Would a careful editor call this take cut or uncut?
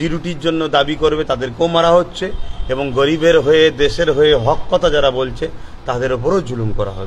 uncut